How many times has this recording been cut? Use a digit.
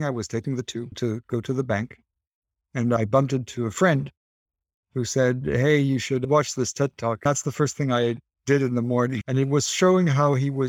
4